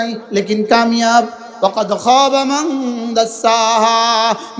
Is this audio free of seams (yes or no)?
no